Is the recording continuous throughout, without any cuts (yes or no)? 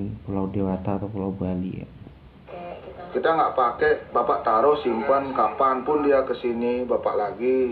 yes